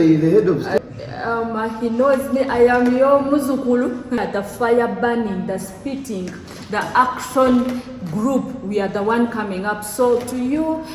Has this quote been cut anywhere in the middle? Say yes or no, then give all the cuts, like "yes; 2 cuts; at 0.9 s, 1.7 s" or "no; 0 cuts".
yes; 2 cuts; at 0.8 s, 4.3 s